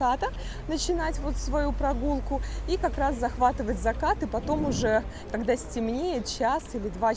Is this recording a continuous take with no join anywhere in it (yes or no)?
yes